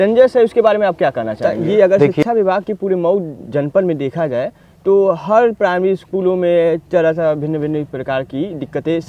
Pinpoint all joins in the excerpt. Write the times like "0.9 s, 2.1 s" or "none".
1.8 s